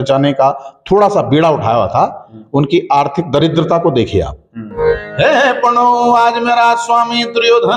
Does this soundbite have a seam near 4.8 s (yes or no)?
yes